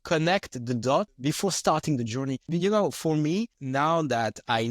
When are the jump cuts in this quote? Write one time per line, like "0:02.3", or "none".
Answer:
0:01.1
0:02.5
0:03.6